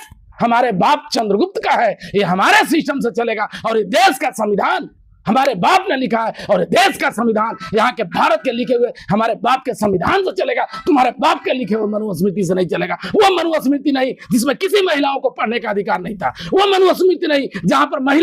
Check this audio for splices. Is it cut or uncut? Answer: uncut